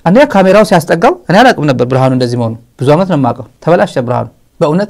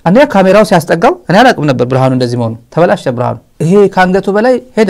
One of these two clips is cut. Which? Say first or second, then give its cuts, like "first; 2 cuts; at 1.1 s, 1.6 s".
second; 2 cuts; at 2.6 s, 3.5 s